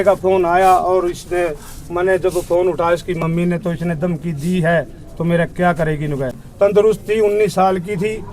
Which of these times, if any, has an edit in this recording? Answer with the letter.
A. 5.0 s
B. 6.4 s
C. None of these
B